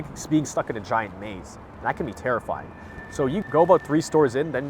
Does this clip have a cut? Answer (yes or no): yes